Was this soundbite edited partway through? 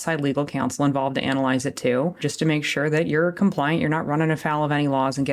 yes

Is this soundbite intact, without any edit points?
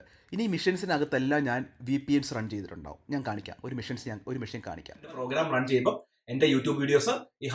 no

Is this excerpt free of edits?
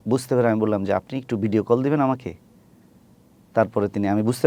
yes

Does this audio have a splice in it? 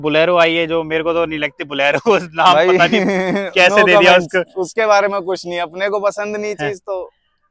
no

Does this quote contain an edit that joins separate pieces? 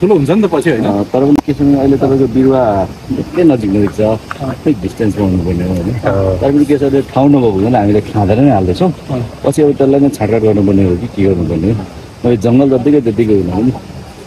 no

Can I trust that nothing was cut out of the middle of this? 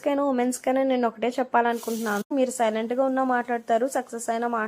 no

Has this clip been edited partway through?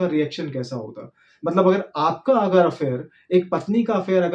no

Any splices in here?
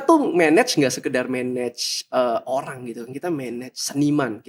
no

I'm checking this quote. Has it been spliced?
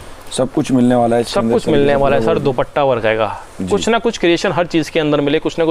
no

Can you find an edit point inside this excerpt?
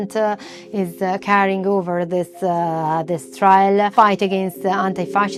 no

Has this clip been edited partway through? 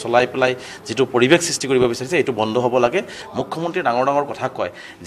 yes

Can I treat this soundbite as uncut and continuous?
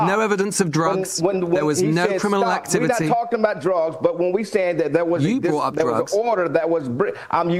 yes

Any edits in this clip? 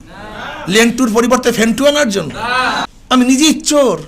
yes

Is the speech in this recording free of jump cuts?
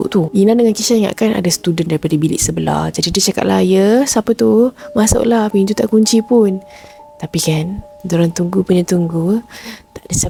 yes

